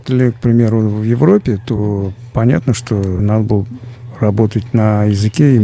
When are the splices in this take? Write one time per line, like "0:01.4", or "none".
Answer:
0:03.2